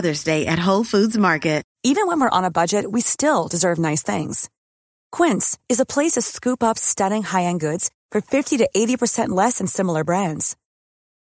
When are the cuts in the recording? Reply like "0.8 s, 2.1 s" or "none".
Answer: 1.7 s